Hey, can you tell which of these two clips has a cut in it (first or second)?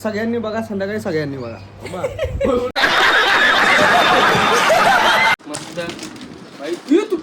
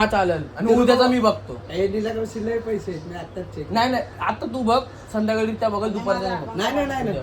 first